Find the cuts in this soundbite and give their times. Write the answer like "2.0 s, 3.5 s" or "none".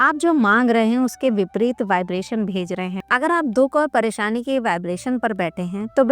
3.0 s